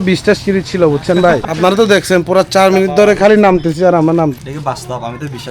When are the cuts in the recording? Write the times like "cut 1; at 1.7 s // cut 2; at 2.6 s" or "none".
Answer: cut 1; at 1.4 s // cut 2; at 4.4 s